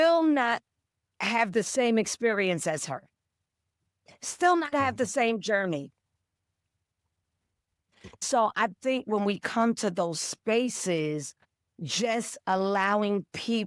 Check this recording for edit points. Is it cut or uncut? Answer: cut